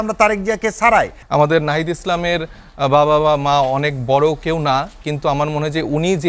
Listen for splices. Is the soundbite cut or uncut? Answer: cut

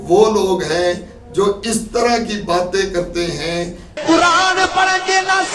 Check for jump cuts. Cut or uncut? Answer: cut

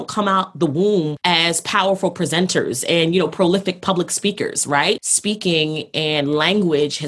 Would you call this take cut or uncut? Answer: cut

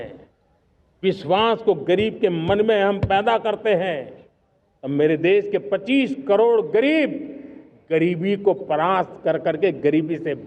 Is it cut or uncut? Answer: uncut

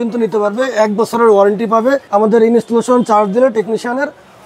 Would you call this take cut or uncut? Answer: cut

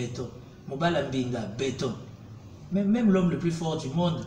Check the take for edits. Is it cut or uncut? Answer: uncut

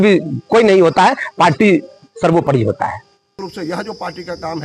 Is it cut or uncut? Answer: cut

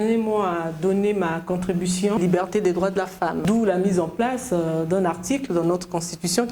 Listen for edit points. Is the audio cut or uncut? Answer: cut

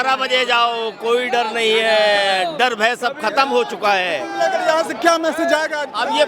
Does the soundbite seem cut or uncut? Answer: uncut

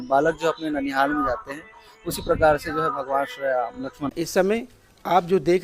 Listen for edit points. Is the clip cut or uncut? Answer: cut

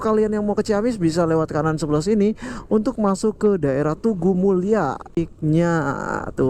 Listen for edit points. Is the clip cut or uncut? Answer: cut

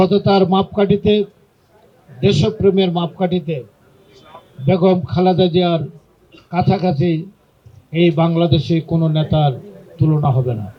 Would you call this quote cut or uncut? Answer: uncut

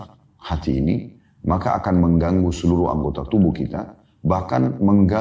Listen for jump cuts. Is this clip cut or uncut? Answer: uncut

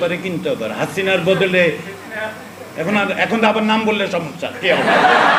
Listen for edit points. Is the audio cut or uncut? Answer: uncut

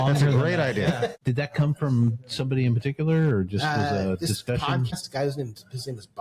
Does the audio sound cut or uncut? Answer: cut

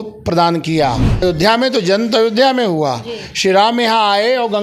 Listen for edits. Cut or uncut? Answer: cut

